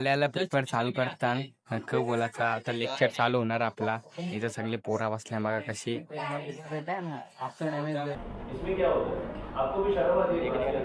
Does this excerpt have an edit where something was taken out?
yes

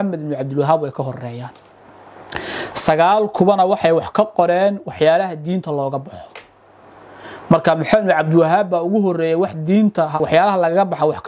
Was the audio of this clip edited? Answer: yes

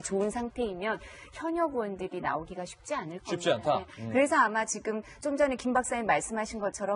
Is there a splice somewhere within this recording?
yes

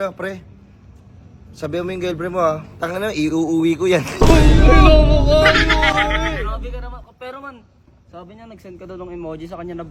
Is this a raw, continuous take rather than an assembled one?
yes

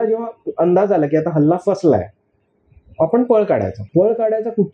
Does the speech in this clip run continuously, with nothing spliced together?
no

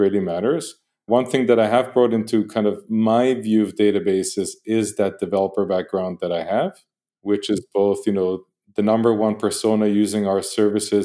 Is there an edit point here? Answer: no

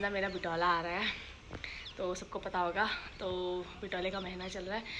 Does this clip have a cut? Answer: no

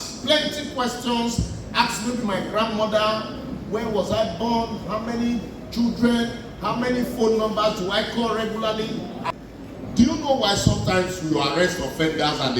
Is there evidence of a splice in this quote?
yes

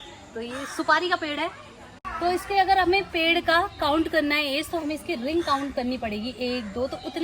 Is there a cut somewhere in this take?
yes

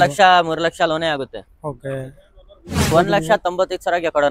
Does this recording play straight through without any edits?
no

